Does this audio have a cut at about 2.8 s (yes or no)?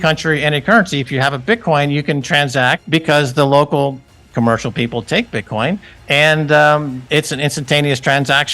yes